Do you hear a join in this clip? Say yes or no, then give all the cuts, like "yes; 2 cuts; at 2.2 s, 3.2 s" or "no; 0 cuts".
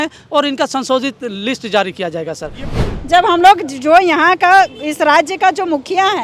yes; 1 cut; at 2.6 s